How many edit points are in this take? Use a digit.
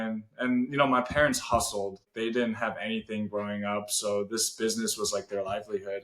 1